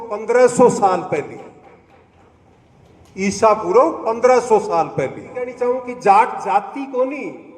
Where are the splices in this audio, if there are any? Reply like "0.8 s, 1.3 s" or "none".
5.6 s